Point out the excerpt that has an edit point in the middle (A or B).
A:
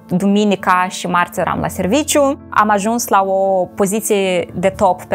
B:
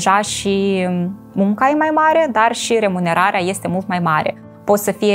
A